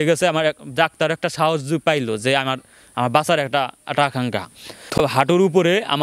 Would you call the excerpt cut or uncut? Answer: cut